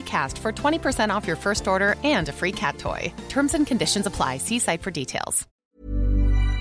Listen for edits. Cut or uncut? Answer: cut